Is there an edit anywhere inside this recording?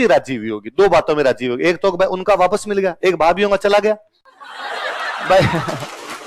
no; 0 cuts

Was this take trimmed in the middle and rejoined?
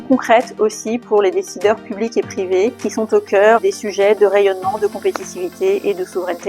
yes; 1 cut; at 2.8 s

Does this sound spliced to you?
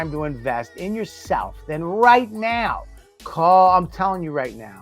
yes; 1 cut; at 2.8 s

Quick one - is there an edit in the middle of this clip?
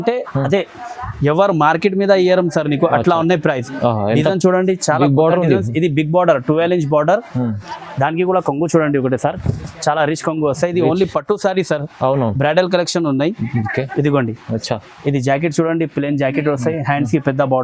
no; 0 cuts

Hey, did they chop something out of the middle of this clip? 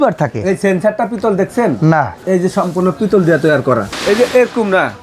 yes; 2 cuts; at 2.2 s, 3.9 s

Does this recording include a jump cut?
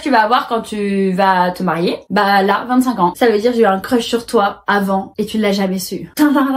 yes; 1 cut; at 3.1 s

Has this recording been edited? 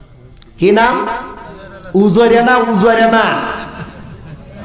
no; 0 cuts

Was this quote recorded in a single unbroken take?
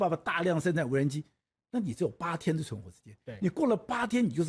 yes; 0 cuts

